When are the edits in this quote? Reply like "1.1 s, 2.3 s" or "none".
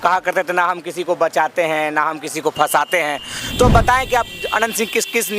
3.4 s